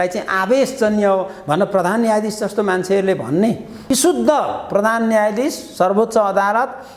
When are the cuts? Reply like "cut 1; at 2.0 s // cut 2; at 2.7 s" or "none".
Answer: cut 1; at 3.8 s